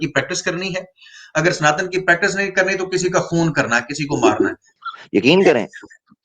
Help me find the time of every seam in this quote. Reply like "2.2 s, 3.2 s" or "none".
4.7 s